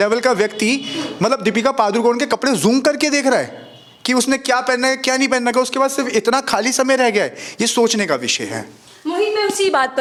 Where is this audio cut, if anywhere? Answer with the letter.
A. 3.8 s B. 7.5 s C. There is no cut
C